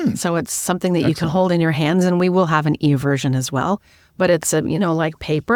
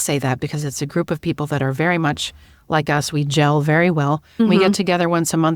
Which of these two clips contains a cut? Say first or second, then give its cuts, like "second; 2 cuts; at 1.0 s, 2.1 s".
second; 1 cut; at 4.4 s